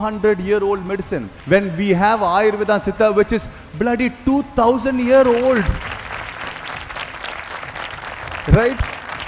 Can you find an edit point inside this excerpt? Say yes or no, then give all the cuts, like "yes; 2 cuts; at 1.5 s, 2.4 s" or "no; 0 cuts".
no; 0 cuts